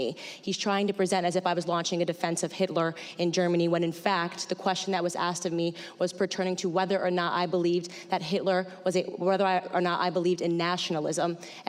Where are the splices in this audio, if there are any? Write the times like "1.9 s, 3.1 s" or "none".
none